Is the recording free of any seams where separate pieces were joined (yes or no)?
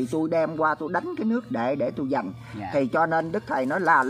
yes